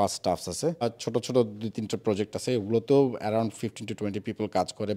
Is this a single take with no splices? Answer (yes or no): no